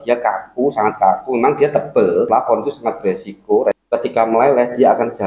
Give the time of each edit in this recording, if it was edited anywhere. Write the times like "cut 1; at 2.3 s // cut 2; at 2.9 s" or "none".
cut 1; at 2.3 s // cut 2; at 3.8 s